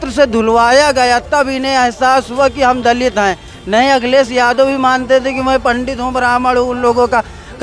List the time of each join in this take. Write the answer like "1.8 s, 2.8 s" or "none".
none